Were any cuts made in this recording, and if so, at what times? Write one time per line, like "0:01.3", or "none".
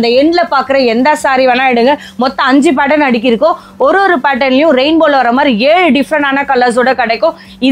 none